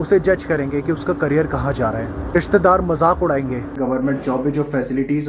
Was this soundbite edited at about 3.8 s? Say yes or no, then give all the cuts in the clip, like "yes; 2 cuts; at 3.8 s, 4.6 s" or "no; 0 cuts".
yes; 2 cuts; at 2.4 s, 3.8 s